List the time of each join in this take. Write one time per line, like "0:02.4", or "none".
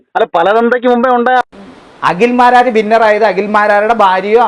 0:01.4